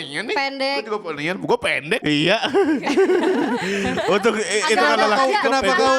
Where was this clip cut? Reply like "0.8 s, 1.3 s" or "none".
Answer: 2.0 s